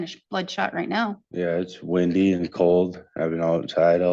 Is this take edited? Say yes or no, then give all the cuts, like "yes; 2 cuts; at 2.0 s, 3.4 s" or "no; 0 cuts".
yes; 1 cut; at 1.2 s